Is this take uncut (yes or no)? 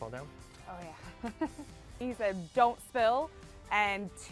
no